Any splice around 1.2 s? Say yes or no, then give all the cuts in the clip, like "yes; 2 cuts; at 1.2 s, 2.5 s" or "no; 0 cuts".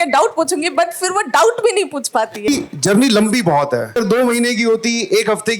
no; 2 cuts; at 2.5 s, 4.0 s